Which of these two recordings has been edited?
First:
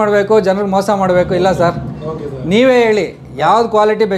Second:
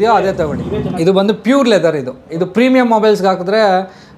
second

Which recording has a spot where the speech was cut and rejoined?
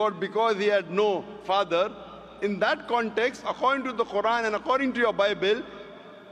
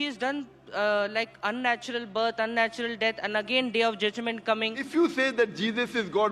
second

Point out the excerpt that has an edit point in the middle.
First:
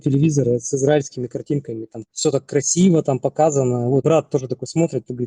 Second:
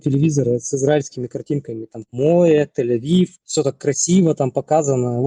first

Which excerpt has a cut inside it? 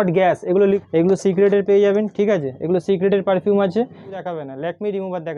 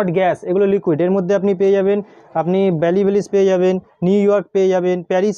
first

